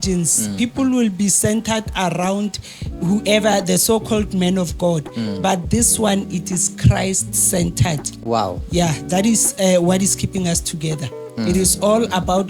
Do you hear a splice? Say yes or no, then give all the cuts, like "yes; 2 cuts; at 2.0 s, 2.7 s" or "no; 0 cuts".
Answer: no; 0 cuts